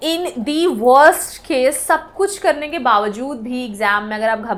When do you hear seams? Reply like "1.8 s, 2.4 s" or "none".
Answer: none